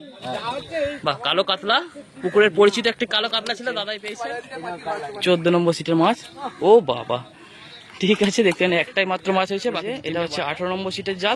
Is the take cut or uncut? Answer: cut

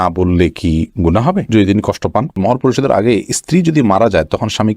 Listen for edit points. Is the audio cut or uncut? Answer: cut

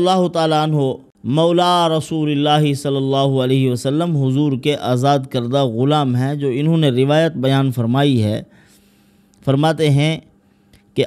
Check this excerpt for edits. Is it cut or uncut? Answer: cut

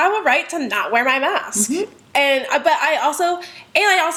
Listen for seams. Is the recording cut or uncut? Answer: uncut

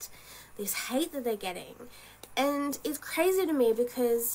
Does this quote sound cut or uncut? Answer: cut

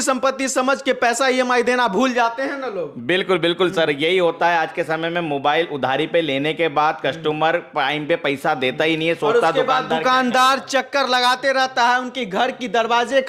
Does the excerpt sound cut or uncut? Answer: uncut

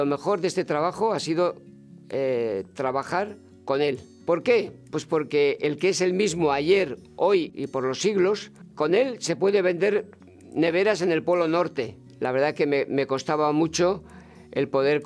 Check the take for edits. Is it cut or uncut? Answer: cut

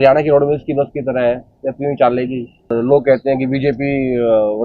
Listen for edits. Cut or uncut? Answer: cut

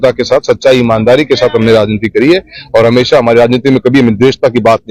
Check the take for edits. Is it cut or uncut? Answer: uncut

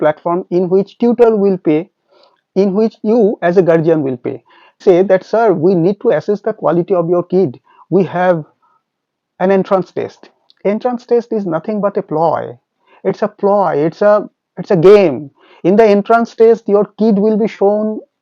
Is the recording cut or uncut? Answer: cut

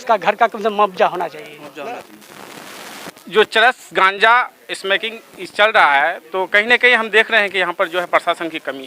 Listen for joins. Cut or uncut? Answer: cut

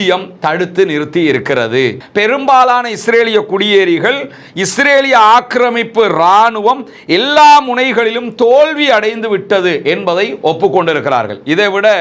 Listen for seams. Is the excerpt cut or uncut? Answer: cut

